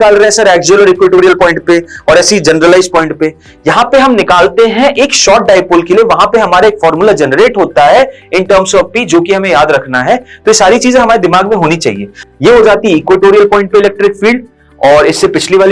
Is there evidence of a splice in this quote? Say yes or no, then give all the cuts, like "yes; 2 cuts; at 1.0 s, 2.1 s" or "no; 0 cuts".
yes; 1 cut; at 12.2 s